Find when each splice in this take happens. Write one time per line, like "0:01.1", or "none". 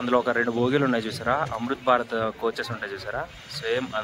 none